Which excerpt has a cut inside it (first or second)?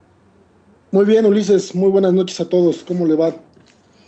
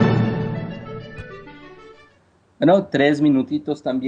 first